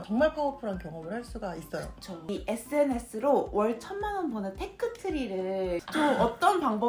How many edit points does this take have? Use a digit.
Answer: 2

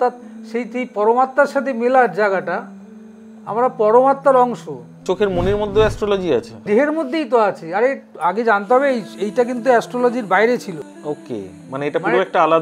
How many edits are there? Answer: 2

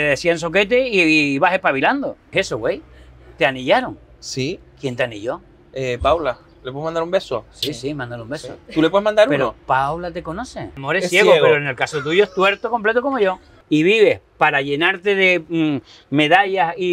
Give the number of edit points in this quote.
3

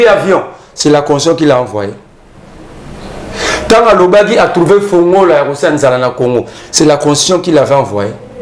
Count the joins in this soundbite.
0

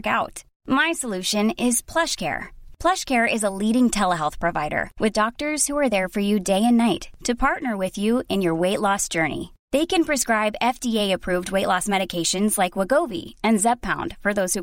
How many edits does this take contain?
0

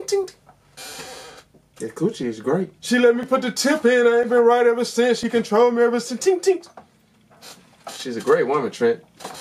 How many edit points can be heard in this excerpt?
1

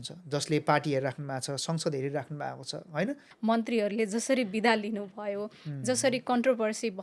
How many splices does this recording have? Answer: 1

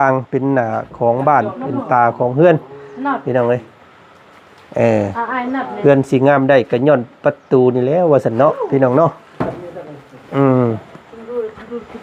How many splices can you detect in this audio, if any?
0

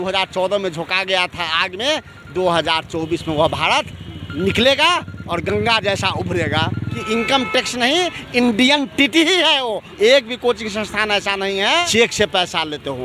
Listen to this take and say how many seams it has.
3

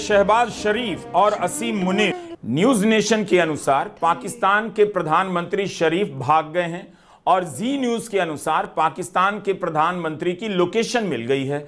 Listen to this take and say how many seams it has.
1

